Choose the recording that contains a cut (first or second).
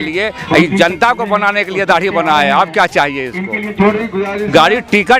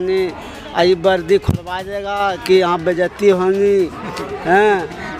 first